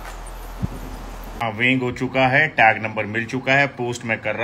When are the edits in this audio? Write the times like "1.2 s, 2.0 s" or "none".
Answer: 1.4 s